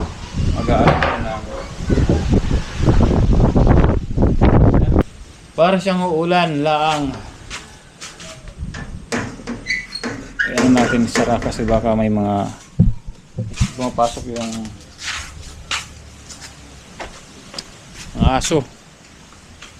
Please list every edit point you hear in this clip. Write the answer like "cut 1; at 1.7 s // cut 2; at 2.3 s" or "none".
cut 1; at 5.1 s